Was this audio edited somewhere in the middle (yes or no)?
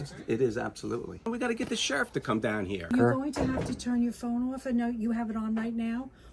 yes